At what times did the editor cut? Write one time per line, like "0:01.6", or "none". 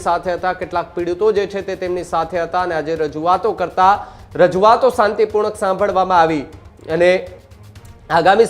none